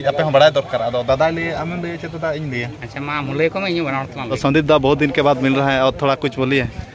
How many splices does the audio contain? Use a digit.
1